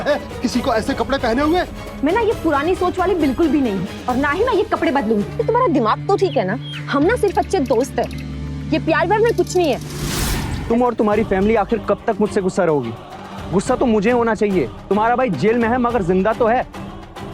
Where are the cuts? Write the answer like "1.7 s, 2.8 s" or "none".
5.3 s, 10.5 s